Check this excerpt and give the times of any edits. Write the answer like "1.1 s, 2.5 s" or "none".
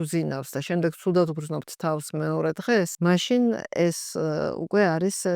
2.9 s